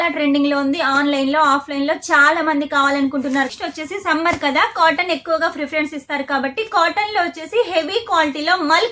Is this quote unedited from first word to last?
no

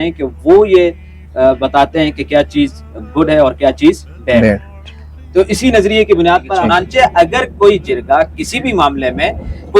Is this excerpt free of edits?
no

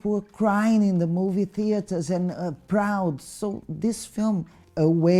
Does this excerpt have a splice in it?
no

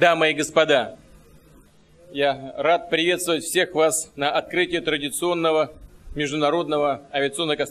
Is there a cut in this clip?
no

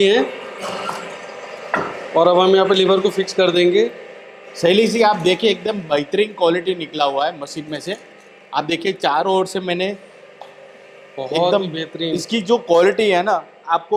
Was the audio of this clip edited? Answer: no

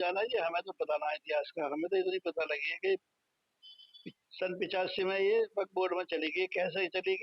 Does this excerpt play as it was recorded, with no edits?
yes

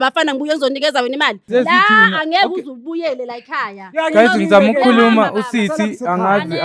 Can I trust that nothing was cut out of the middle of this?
no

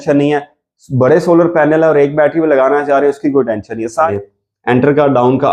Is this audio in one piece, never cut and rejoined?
no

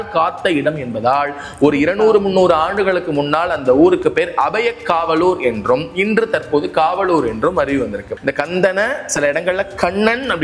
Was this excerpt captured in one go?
no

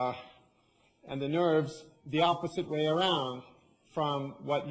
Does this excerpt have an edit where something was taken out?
no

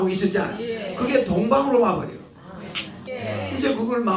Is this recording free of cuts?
no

